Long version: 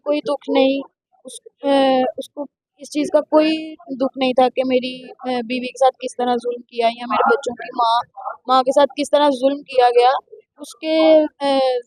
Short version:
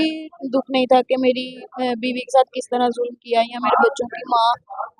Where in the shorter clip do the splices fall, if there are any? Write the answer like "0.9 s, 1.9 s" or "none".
none